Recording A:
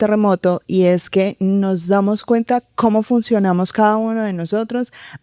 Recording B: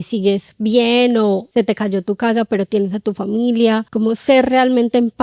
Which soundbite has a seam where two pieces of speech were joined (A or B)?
B